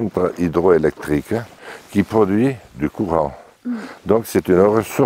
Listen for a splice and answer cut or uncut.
cut